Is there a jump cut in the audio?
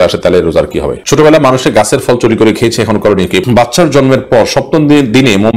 yes; 2 cuts; at 1.0 s, 3.4 s

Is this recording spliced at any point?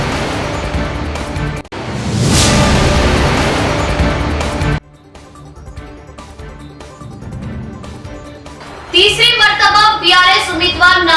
no; 0 cuts

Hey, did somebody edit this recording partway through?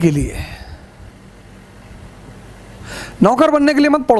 no; 0 cuts

